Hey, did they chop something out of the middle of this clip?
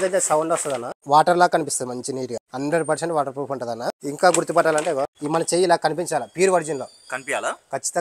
yes; 4 cuts; at 1.0 s, 2.4 s, 4.0 s, 5.2 s

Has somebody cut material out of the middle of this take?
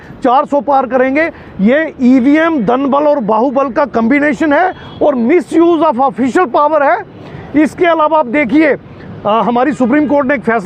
no; 0 cuts

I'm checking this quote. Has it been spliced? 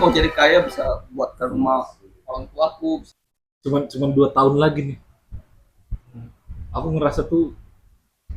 yes; 1 cut; at 3.1 s

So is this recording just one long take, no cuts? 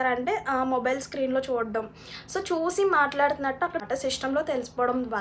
no; 1 cut; at 3.8 s

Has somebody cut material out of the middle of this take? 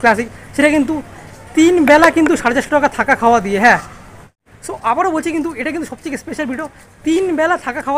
no; 0 cuts

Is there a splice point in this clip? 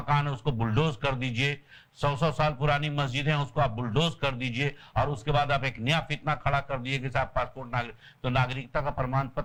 no; 0 cuts

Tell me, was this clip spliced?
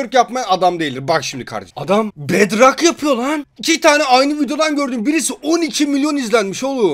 yes; 1 cut; at 1.7 s

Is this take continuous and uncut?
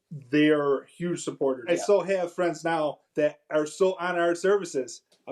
no; 2 cuts; at 1.6 s, 3.0 s

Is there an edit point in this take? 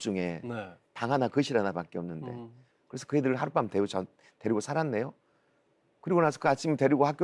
yes; 1 cut; at 0.9 s

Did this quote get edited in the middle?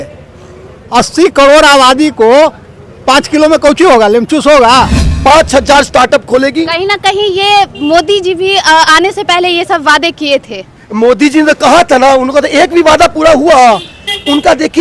yes; 1 cut; at 5.0 s

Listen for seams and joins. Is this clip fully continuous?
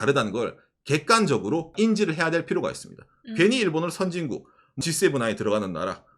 no; 2 cuts; at 1.7 s, 4.8 s

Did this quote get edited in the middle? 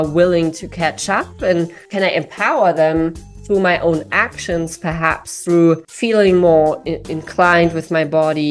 yes; 2 cuts; at 1.8 s, 5.9 s

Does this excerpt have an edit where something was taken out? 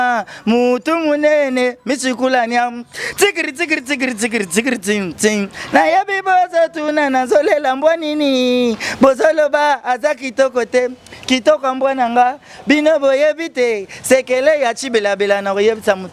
no; 0 cuts

